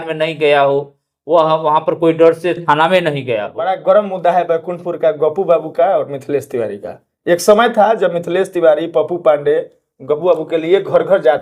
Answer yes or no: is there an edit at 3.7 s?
yes